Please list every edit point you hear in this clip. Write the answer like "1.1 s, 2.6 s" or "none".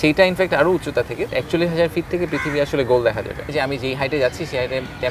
1.3 s, 3.5 s